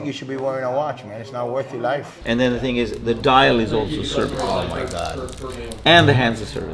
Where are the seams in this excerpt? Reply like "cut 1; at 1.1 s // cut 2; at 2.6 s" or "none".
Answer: cut 1; at 2.1 s